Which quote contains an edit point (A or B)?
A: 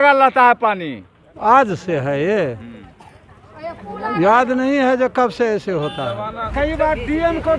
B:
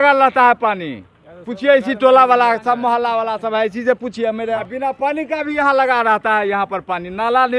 A